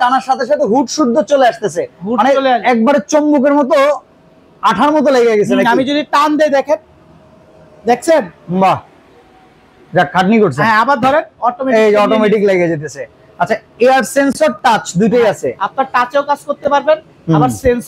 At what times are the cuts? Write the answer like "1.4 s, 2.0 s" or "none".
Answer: none